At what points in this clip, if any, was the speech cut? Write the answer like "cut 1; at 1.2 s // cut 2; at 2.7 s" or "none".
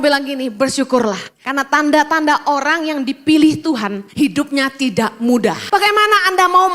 cut 1; at 1.3 s // cut 2; at 4.0 s // cut 3; at 5.6 s